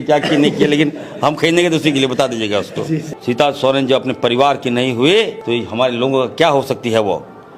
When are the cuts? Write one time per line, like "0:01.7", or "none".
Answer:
0:03.1
0:05.4